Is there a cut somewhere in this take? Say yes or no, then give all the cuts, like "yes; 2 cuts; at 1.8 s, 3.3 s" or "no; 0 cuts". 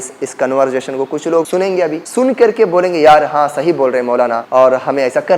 yes; 2 cuts; at 1.6 s, 4.4 s